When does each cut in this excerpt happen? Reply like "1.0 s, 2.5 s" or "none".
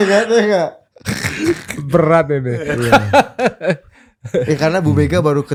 none